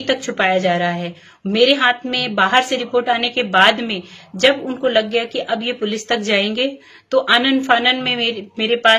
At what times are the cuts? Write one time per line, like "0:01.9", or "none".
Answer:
none